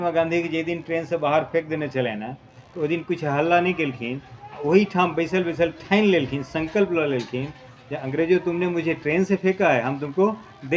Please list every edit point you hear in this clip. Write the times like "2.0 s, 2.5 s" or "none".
none